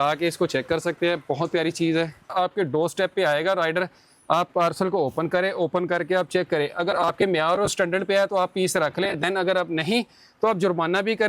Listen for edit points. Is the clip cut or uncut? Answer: cut